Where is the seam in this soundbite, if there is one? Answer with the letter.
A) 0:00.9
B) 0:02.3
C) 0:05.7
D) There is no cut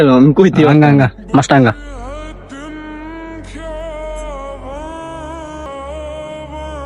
C